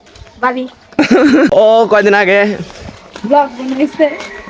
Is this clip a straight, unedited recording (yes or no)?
no